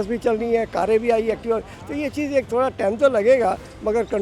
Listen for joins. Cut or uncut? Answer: uncut